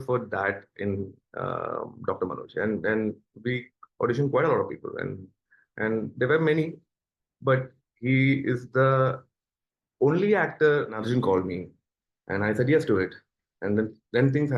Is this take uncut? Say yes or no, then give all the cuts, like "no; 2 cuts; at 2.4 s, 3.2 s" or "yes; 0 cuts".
no; 1 cut; at 11.0 s